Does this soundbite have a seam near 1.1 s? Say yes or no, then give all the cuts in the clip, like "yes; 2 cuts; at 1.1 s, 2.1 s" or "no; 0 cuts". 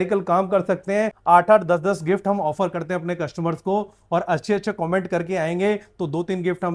yes; 1 cut; at 1.1 s